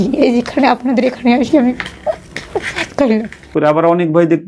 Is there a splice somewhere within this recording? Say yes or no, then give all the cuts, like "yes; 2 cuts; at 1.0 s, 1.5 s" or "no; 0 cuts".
yes; 1 cut; at 3.5 s